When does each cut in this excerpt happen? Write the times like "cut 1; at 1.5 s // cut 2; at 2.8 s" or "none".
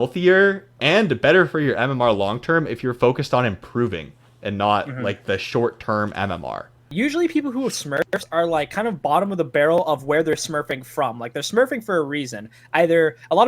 cut 1; at 6.9 s